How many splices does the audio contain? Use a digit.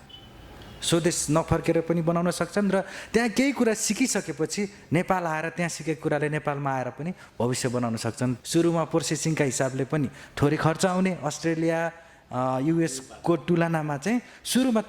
1